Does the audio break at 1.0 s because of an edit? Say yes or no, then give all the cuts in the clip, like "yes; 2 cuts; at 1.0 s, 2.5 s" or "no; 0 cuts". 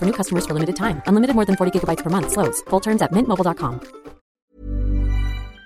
no; 1 cut; at 4.5 s